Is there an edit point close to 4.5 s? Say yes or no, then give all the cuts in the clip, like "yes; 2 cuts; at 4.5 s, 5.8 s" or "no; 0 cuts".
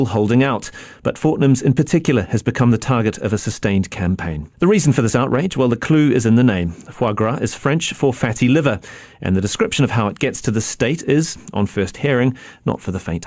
no; 1 cut; at 11.9 s